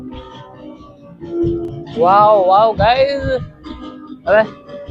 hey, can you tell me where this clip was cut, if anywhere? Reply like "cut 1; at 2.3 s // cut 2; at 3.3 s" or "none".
none